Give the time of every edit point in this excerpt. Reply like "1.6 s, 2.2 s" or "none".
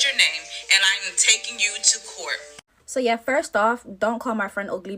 2.7 s